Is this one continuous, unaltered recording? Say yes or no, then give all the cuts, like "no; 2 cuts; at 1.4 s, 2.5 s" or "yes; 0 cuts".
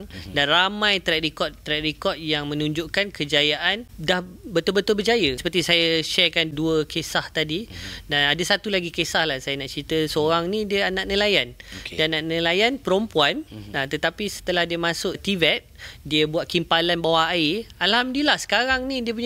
no; 4 cuts; at 3.9 s, 5.4 s, 6.5 s, 15.2 s